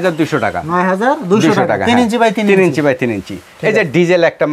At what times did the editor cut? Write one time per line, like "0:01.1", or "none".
none